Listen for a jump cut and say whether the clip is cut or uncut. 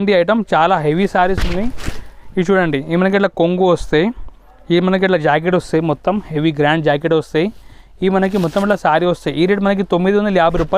uncut